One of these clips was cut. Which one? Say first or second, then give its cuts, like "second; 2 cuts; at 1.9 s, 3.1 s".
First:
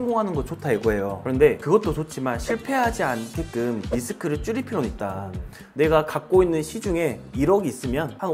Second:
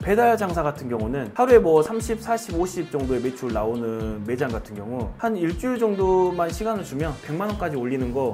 first; 3 cuts; at 1.6 s, 3.8 s, 5.6 s